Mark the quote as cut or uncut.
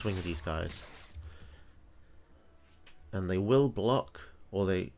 cut